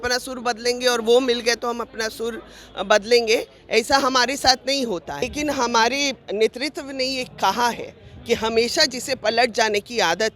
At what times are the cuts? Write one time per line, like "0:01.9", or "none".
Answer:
0:05.3